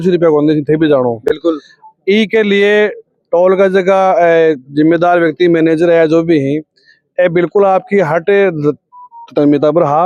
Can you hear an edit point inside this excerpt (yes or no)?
no